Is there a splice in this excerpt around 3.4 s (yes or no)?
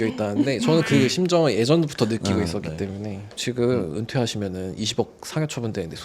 yes